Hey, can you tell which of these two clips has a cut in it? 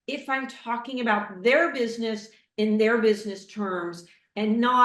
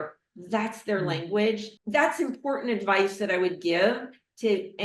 second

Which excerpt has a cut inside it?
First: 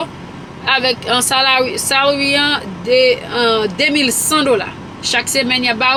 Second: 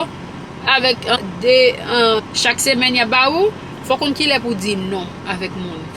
second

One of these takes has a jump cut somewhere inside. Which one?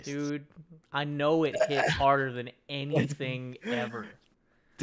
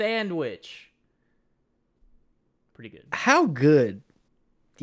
second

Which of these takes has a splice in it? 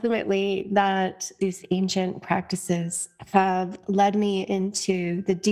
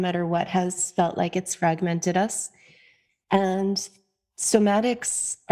first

